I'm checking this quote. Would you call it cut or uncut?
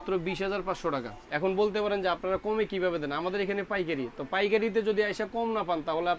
cut